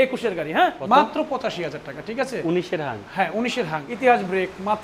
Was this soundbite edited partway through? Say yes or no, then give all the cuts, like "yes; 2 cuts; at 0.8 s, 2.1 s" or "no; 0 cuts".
yes; 2 cuts; at 0.8 s, 3.9 s